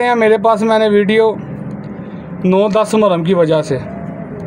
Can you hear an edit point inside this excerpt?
no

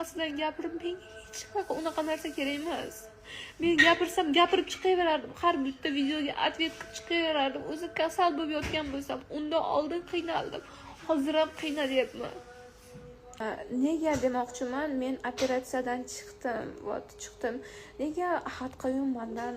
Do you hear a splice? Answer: yes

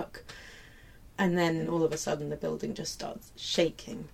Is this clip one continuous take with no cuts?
no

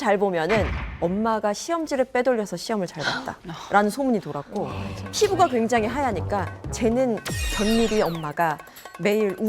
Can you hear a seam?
no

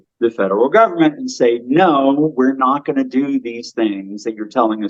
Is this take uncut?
yes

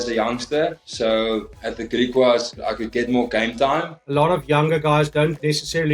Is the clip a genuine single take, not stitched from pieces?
no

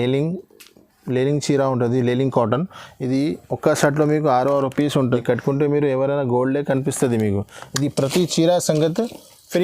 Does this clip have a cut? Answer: yes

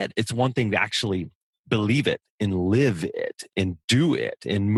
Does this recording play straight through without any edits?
yes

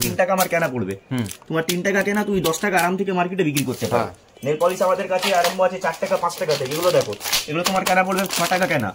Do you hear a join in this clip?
no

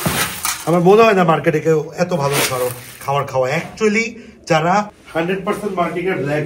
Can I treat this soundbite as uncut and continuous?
no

